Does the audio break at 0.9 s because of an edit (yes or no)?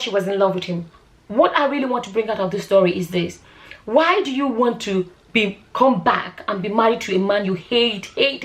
yes